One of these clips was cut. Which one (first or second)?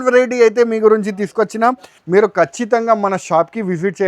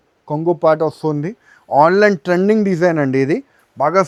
first